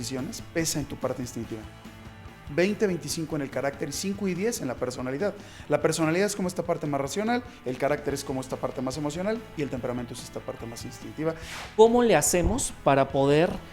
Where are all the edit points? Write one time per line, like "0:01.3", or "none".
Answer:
0:11.5

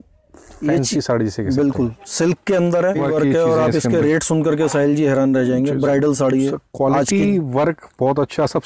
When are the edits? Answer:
0:03.0

